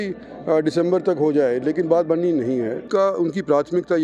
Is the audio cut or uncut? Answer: cut